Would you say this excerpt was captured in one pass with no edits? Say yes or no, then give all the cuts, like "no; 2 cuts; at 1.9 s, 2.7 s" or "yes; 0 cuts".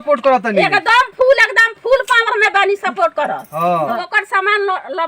no; 1 cut; at 4.0 s